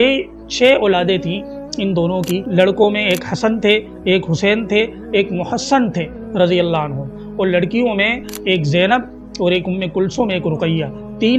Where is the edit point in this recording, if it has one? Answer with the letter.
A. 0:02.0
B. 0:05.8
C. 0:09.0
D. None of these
D